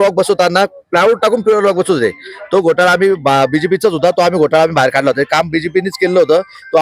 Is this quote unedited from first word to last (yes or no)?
yes